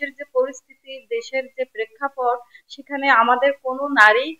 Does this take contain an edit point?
no; 0 cuts

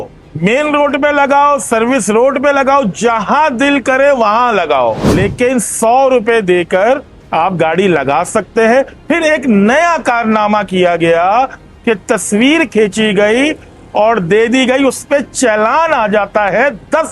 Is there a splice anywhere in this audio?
yes; 1 cut; at 5.0 s

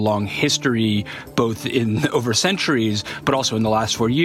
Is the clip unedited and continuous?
yes; 0 cuts

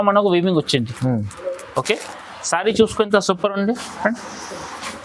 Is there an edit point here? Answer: no; 0 cuts

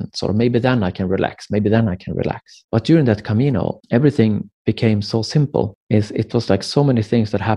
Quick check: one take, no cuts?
no; 3 cuts; at 2.5 s, 3.8 s, 5.8 s

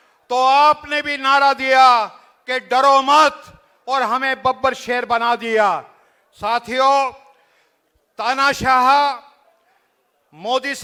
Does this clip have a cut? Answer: no; 0 cuts

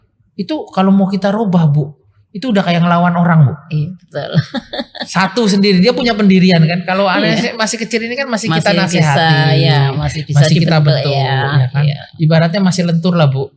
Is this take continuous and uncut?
yes; 0 cuts

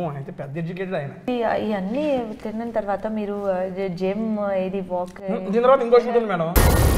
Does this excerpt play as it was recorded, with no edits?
no; 1 cut; at 1.3 s

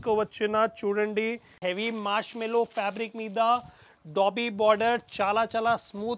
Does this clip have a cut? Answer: yes; 1 cut; at 1.6 s

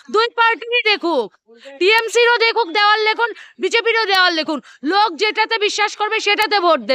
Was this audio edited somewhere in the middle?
no; 0 cuts

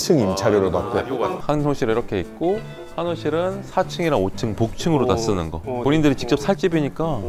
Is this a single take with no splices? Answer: no; 2 cuts; at 1.4 s, 5.8 s

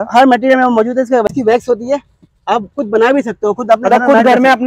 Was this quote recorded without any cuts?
no; 1 cut; at 1.2 s

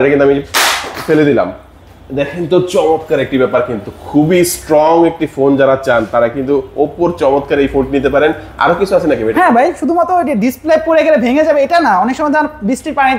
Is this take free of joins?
yes; 0 cuts

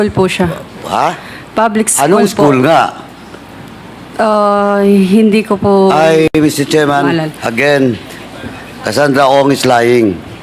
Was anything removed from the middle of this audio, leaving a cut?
no; 0 cuts

